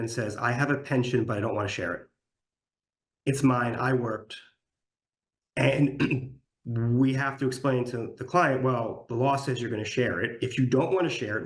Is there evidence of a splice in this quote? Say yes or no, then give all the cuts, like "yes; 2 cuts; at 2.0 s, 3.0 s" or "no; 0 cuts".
no; 0 cuts